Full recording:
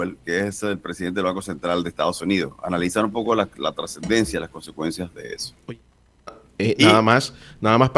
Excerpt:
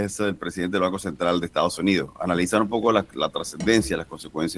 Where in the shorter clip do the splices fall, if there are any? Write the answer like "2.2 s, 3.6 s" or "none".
none

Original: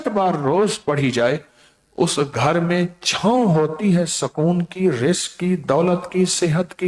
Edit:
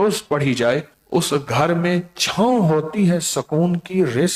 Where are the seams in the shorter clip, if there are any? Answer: 0.9 s

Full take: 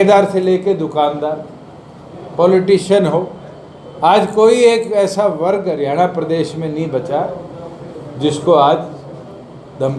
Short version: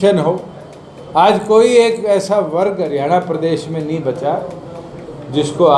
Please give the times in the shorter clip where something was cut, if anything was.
none

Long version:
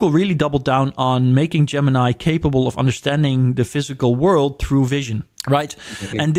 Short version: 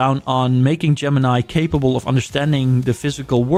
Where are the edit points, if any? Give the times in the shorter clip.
none

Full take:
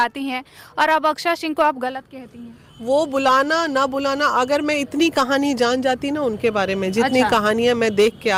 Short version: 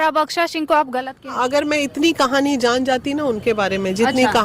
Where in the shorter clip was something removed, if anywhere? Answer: 1.3 s

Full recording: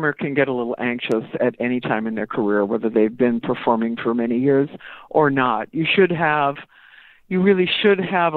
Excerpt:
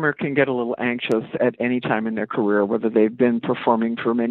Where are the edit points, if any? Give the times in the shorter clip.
none

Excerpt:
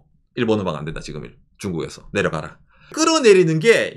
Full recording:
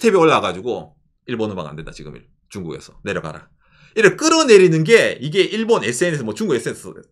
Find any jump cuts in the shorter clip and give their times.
2.9 s

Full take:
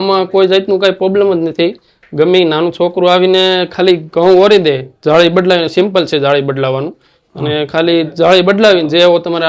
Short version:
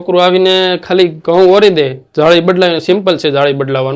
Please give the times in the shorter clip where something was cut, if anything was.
none

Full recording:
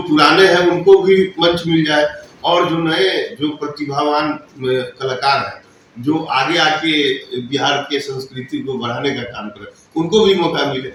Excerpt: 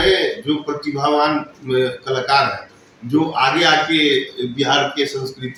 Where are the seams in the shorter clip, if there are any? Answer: none

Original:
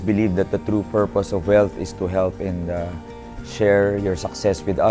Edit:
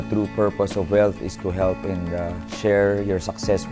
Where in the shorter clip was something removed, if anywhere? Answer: 2.4 s

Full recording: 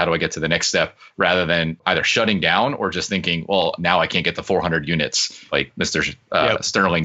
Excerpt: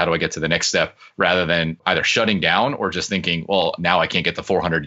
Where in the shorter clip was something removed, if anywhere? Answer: none

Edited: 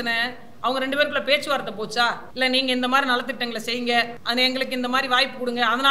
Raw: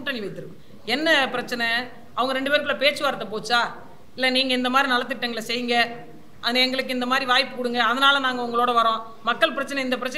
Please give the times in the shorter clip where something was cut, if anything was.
2.2 s, 4.2 s

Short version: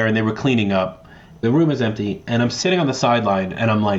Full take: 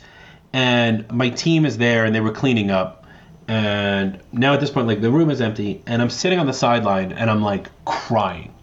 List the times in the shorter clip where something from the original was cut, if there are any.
1.4 s

